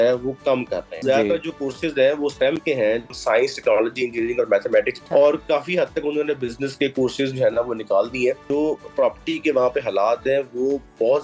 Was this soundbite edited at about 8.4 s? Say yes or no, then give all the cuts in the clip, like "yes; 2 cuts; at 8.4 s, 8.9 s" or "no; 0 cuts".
yes; 4 cuts; at 1.0 s, 3.1 s, 5.0 s, 8.4 s